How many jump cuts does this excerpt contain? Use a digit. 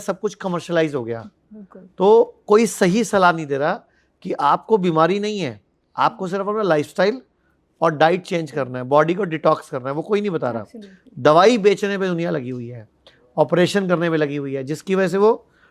0